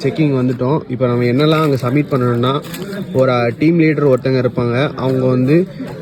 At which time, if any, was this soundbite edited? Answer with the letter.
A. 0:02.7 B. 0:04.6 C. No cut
C